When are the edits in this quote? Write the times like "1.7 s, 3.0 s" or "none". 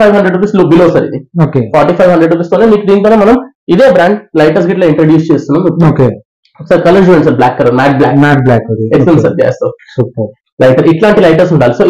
none